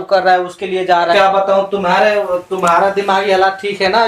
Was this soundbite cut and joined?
yes; 1 cut; at 1.1 s

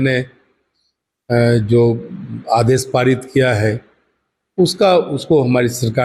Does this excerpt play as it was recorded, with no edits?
yes; 0 cuts

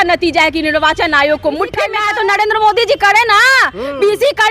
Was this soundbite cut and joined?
yes; 1 cut; at 2.0 s

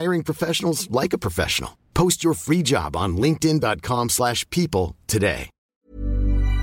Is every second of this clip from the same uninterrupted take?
no; 1 cut; at 5.7 s

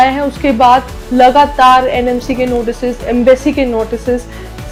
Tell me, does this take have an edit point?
no; 0 cuts

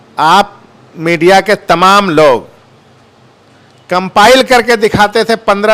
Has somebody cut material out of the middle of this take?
no; 0 cuts

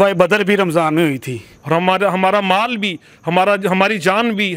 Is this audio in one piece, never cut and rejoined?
no; 1 cut; at 1.5 s

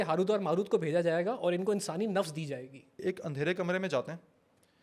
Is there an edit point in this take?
yes; 1 cut; at 3.0 s

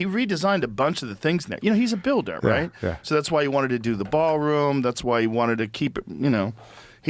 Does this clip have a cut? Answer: no; 0 cuts

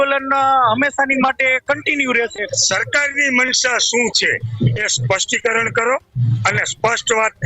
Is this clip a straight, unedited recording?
no; 1 cut; at 2.5 s

